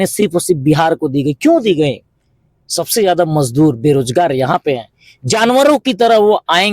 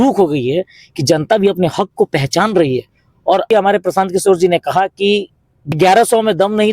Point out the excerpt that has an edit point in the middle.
second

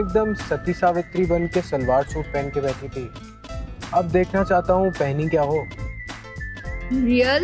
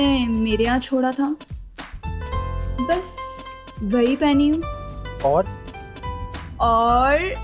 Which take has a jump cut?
second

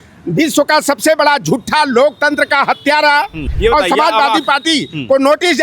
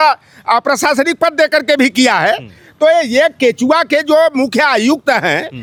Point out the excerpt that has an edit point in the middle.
first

